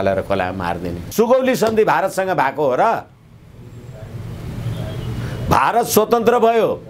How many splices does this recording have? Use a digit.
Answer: 1